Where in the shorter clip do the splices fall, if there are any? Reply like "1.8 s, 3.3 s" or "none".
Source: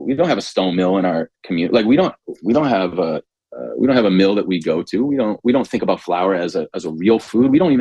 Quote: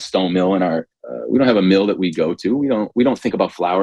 0.9 s